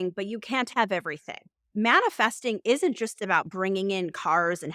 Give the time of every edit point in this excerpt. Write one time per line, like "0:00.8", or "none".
0:01.6